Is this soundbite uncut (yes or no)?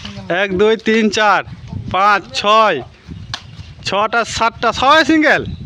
yes